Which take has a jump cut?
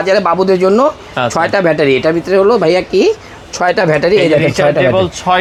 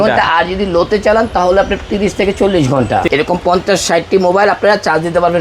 second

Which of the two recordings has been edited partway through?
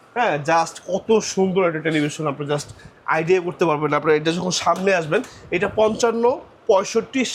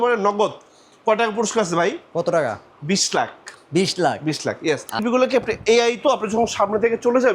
second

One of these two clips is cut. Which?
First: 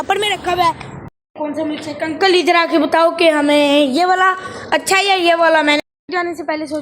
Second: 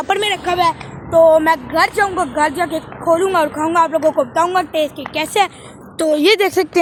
first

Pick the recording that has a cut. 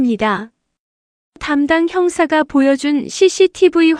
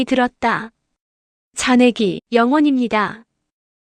second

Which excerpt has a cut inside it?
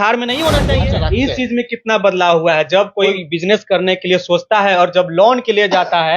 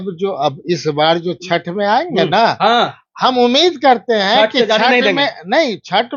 first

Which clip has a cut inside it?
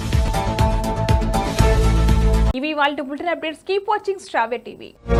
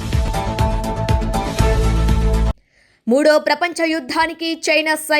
second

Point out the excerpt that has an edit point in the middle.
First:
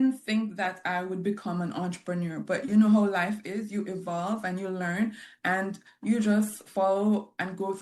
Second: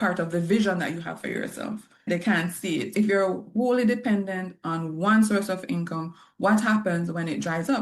second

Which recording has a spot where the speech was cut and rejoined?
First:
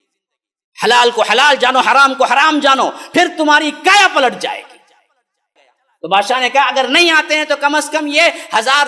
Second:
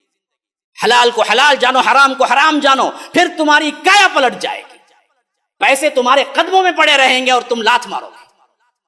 first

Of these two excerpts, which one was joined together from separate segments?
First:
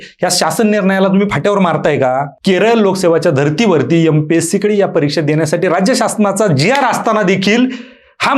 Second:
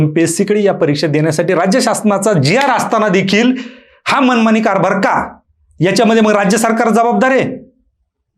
first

